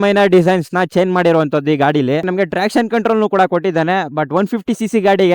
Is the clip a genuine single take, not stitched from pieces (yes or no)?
no